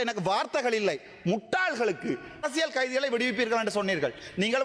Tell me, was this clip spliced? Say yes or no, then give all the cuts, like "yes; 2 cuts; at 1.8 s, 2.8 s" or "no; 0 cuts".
yes; 1 cut; at 2.4 s